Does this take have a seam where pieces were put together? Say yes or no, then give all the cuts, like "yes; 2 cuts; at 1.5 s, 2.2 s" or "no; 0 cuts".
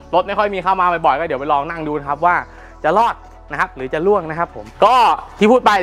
no; 0 cuts